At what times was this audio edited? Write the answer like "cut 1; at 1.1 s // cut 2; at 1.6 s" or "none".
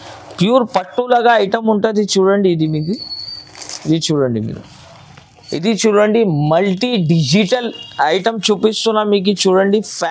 cut 1; at 5.5 s